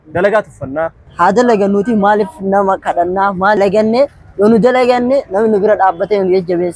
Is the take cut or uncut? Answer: cut